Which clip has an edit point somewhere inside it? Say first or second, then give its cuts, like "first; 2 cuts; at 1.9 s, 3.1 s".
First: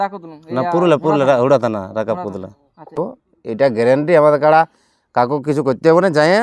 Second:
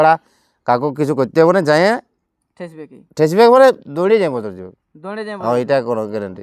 first; 1 cut; at 3.0 s